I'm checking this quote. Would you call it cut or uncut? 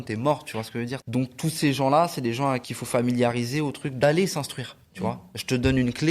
cut